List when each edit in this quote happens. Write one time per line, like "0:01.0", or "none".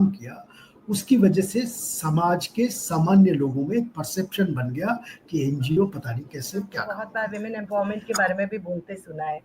0:07.1